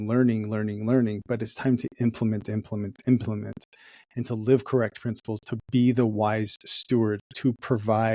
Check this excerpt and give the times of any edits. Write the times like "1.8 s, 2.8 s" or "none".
none